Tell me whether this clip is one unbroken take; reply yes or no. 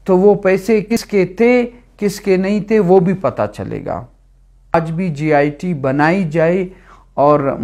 no